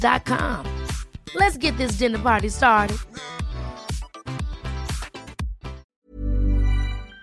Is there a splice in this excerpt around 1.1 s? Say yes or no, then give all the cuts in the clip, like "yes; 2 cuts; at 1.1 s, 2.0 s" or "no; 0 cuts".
no; 1 cut; at 5.9 s